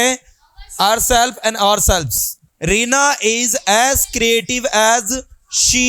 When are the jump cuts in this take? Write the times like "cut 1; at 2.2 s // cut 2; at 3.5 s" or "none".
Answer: cut 1; at 2.3 s